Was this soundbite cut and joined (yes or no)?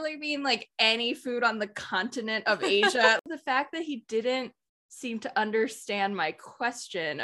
yes